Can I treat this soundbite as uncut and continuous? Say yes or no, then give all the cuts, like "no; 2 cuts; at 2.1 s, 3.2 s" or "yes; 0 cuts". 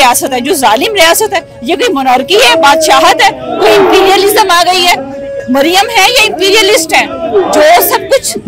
yes; 0 cuts